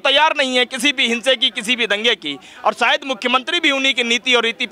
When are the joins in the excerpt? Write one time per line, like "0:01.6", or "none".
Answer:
none